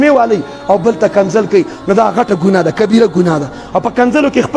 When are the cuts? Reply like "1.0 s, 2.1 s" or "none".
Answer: none